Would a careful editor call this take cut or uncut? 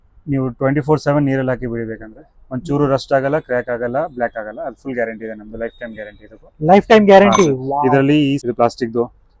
cut